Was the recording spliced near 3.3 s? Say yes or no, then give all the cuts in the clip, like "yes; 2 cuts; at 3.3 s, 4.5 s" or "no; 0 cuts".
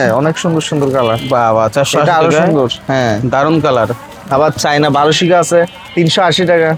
no; 0 cuts